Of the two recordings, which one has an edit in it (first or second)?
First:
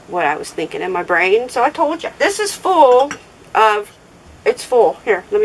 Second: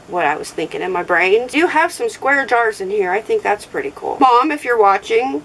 second